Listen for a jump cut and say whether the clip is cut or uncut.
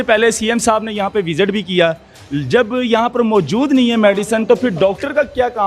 uncut